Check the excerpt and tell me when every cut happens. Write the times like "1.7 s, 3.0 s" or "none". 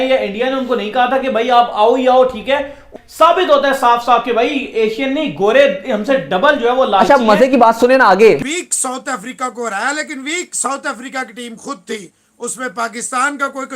2.9 s, 8.5 s